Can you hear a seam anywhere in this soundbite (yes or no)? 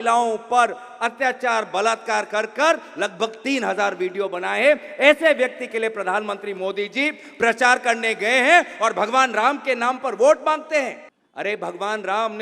yes